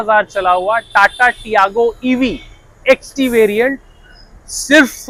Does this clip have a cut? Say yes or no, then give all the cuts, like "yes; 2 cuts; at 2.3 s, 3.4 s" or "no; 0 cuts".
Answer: no; 0 cuts